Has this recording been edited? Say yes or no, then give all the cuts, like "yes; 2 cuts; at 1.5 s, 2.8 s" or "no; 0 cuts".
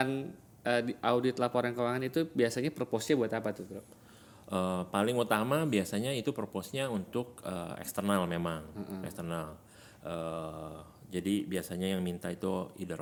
no; 0 cuts